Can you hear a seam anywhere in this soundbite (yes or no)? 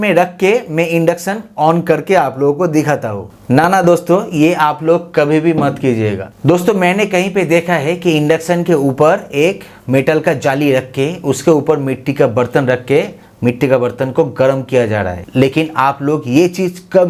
no